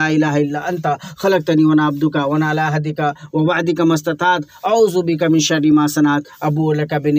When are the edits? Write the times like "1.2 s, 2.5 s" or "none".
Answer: none

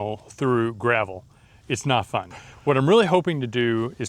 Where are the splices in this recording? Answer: 2.5 s

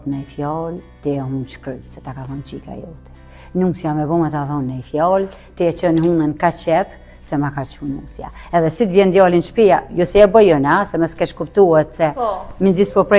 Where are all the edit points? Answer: none

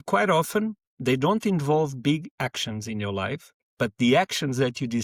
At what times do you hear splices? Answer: none

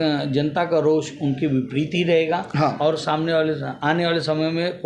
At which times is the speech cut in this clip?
none

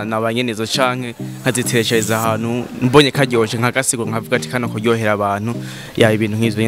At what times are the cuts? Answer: none

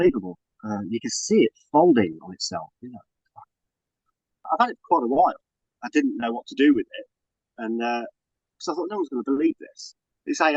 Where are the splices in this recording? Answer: 4.5 s

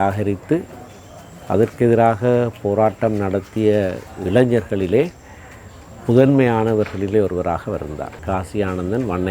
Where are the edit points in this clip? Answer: 8.1 s

